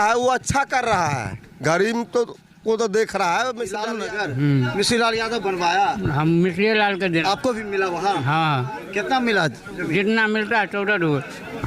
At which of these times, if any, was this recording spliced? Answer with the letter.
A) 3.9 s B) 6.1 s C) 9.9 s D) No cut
A